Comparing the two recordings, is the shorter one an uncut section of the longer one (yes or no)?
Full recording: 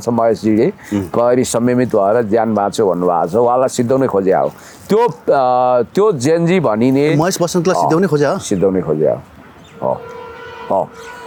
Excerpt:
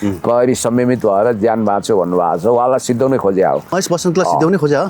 no